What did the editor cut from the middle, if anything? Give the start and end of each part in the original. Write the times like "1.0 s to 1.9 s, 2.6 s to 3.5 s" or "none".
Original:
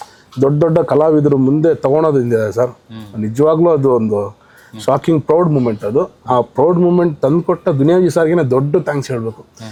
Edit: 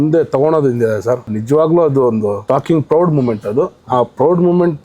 2.8 s to 3.2 s, 4.3 s to 4.8 s

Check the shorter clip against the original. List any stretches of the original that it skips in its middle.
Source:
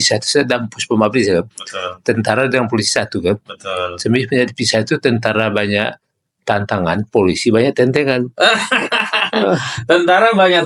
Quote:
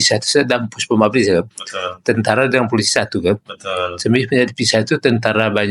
none

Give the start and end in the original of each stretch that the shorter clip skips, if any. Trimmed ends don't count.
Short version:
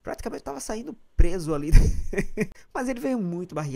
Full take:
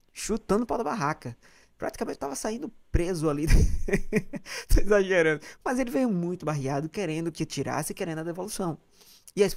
4.4 s to 5.5 s

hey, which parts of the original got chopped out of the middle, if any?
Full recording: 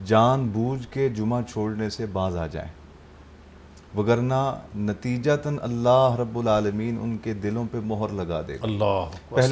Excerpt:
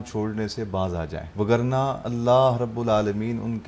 2.6 s to 3.8 s, 4.6 s to 5.6 s

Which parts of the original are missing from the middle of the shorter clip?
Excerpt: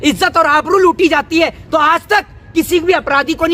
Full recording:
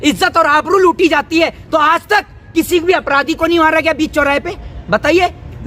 none

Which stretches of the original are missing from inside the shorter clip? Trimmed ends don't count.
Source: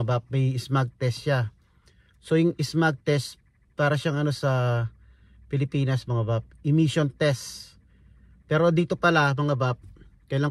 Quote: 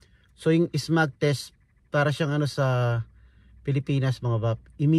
none

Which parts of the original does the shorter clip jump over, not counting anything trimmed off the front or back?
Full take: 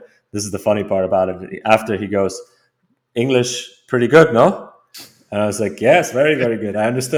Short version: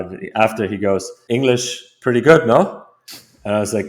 2.4 s to 3.0 s

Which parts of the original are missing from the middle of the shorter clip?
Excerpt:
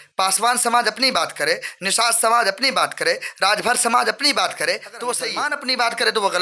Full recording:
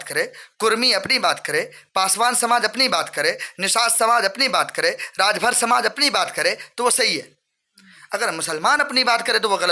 7.2 s to 8.7 s

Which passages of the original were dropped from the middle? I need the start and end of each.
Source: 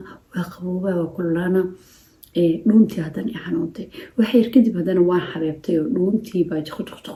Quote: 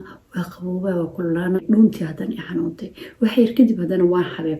1.6 s to 2.6 s

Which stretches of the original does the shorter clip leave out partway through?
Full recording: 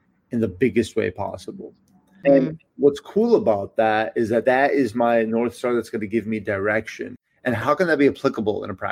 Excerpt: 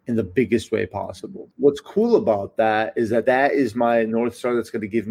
1.7 s to 2.6 s

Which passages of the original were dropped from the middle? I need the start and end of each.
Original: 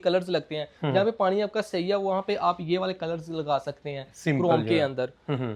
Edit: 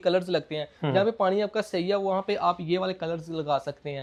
none

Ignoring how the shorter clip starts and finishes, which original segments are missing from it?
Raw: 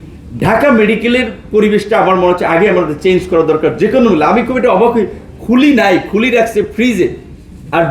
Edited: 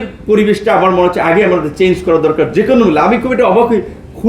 none

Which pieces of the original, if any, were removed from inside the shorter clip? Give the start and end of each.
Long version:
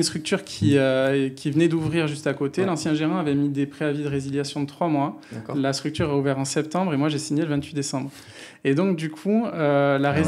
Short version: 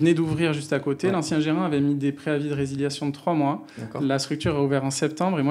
none

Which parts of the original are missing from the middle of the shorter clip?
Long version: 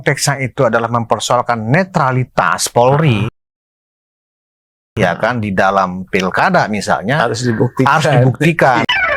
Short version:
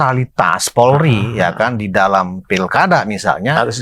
3.3 s to 4.9 s

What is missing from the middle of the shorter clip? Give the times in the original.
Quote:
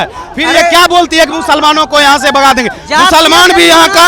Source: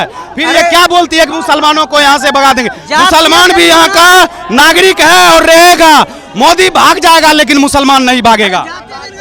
none

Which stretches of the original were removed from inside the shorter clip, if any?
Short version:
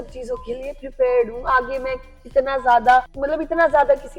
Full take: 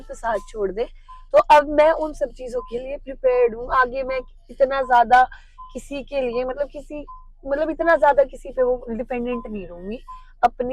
5.4 s to 7.4 s

